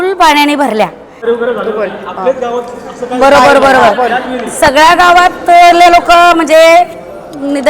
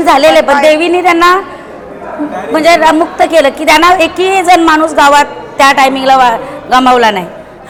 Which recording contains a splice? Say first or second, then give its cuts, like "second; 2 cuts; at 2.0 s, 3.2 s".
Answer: first; 1 cut; at 1.2 s